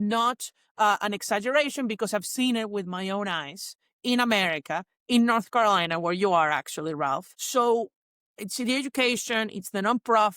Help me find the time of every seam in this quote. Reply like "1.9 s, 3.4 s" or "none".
7.3 s